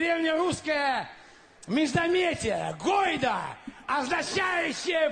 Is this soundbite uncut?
no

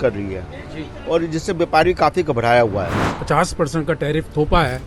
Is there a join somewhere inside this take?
yes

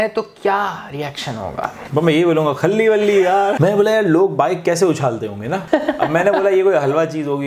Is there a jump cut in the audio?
yes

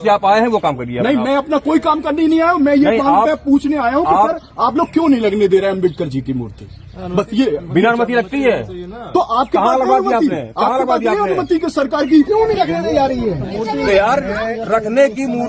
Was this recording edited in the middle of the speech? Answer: yes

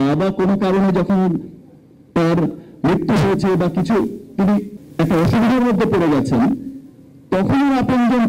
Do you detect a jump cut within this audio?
yes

